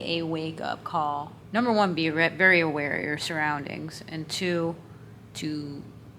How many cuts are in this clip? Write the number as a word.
one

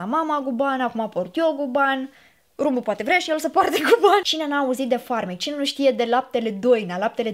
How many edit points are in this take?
one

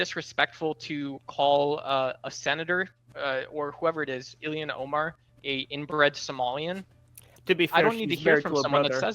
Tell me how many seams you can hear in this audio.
two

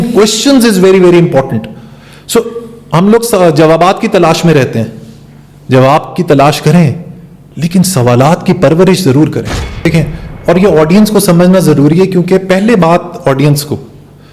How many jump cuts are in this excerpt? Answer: one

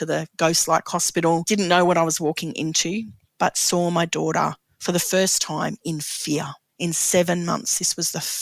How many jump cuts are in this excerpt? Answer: three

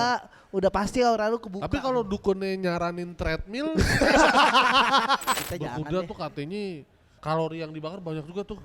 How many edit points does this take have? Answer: two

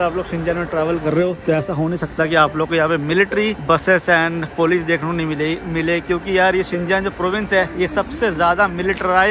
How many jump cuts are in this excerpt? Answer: one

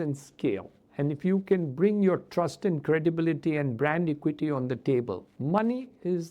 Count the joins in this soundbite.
one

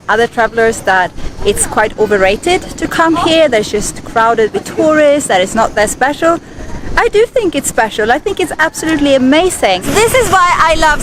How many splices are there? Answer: one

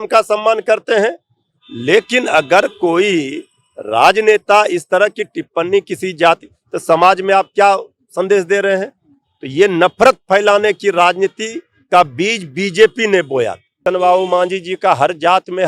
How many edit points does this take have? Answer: one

